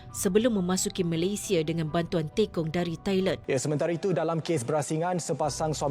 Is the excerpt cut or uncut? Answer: cut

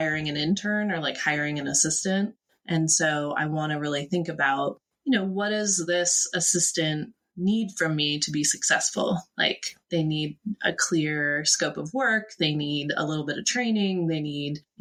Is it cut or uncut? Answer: uncut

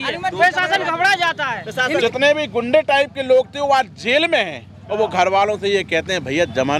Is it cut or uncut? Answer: cut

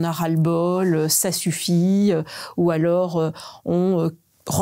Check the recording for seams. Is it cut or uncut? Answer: uncut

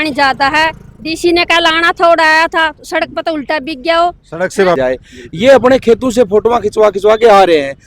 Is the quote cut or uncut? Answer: cut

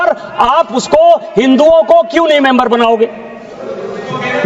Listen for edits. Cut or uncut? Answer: uncut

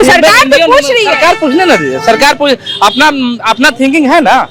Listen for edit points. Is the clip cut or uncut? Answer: uncut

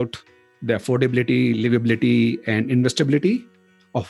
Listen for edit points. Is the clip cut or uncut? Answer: uncut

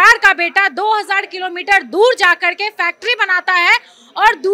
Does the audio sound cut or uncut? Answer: uncut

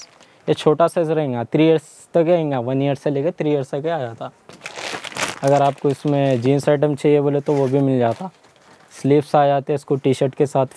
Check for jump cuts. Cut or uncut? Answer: uncut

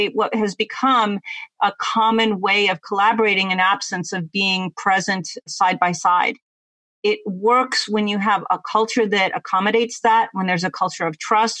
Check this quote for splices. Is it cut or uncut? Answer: uncut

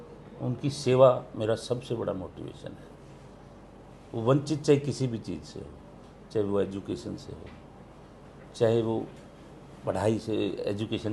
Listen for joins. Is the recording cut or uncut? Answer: uncut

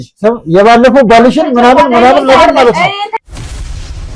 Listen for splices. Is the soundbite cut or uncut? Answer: uncut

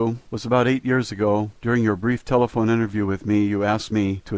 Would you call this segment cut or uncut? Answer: cut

